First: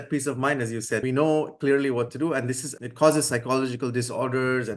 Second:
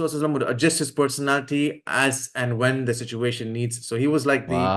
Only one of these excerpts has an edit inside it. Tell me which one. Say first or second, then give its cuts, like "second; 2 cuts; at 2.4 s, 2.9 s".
first; 2 cuts; at 1.0 s, 2.7 s